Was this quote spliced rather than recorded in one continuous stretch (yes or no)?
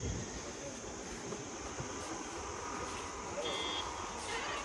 no